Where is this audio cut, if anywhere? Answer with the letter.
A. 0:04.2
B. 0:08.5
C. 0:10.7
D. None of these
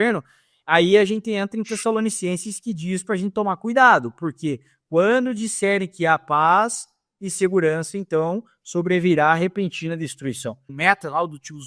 C